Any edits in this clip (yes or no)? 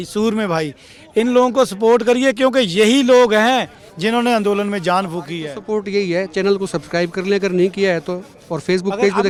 no